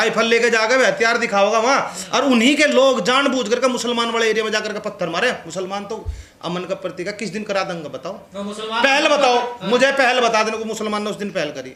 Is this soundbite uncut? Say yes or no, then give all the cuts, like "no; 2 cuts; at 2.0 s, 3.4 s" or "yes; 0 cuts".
yes; 0 cuts